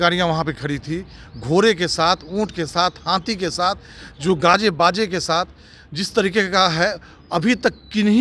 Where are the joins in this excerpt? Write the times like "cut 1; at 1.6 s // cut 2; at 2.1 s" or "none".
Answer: none